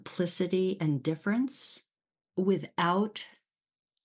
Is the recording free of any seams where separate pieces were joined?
yes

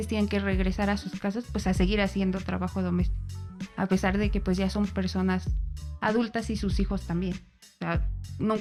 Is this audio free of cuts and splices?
yes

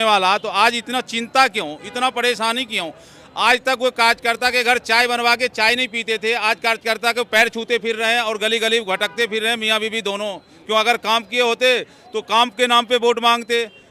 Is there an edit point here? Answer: no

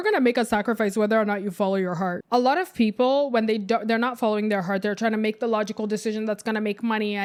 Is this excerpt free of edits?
yes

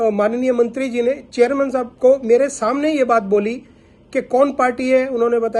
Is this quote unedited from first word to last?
yes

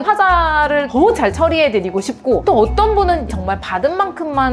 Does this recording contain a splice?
no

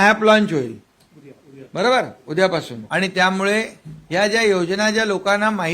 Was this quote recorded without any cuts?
no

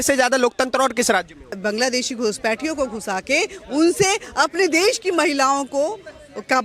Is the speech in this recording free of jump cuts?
no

